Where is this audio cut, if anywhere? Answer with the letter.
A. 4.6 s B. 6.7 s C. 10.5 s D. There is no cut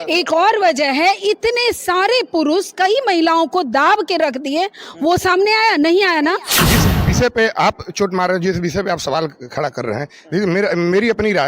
B